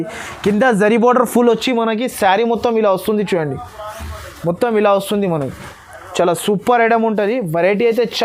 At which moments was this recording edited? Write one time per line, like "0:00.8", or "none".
none